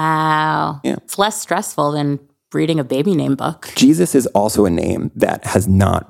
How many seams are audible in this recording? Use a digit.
2